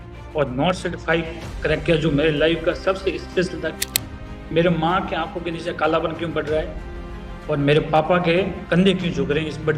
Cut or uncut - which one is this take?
cut